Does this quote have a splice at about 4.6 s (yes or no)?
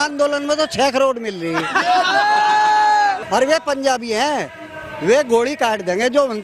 no